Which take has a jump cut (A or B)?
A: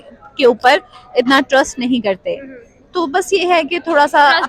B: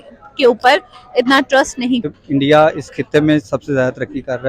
B